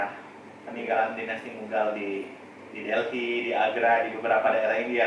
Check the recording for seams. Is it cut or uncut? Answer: uncut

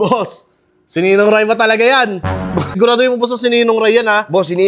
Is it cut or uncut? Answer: cut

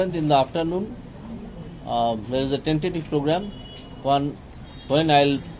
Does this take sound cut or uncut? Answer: uncut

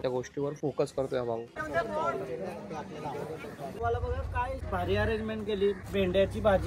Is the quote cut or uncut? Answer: cut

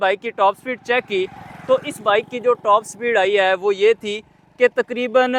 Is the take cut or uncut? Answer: uncut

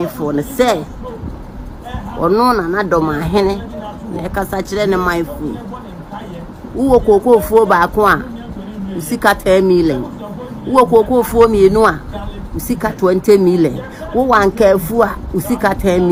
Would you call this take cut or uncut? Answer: uncut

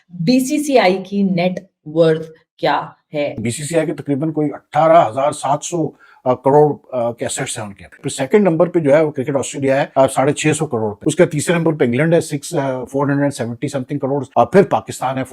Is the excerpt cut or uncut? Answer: cut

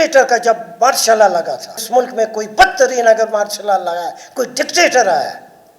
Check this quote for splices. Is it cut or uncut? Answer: cut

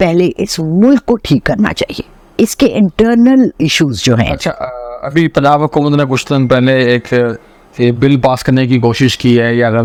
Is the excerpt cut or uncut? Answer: uncut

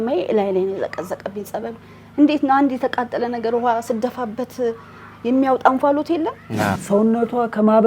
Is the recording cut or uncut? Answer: cut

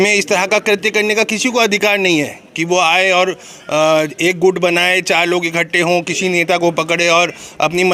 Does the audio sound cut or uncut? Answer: uncut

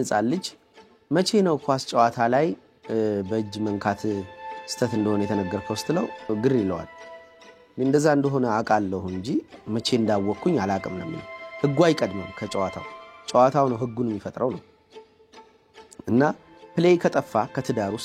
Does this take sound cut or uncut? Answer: cut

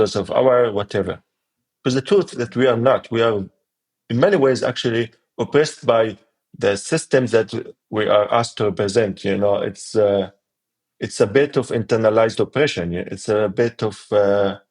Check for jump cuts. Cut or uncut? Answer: uncut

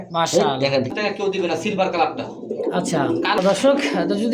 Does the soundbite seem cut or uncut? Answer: cut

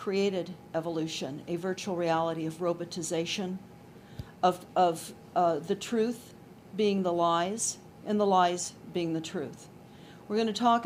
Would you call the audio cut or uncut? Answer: uncut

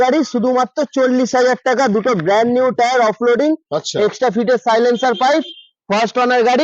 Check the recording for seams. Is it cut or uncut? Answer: uncut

